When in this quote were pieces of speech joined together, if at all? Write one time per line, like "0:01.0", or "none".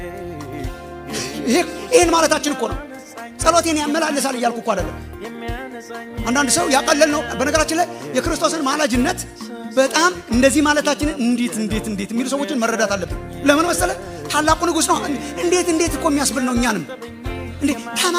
none

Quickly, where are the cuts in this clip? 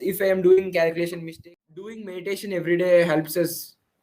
0:01.3

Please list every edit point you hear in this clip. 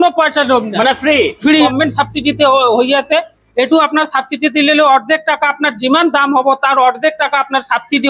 0:01.7

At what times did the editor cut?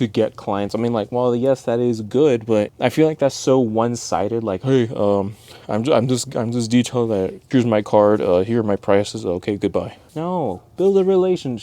0:02.7
0:07.4
0:10.0

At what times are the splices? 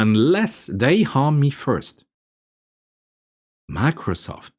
none

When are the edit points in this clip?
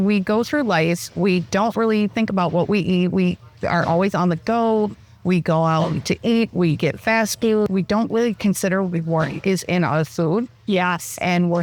none

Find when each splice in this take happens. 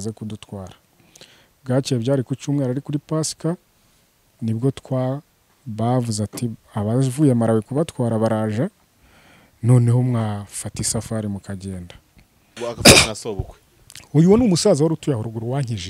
0:12.5

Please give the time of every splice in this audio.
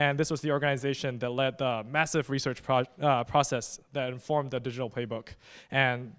none

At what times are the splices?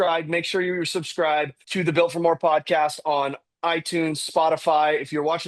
0:01.6

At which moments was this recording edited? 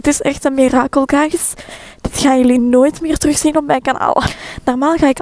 0:04.2

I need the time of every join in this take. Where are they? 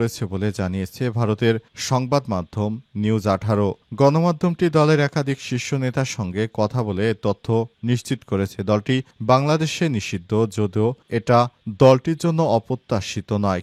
none

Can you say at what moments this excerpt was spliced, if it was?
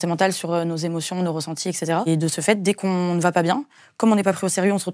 0:02.1

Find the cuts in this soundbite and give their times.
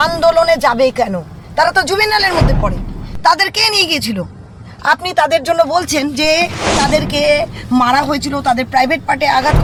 none

